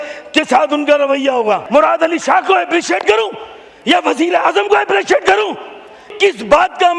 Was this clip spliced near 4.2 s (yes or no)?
no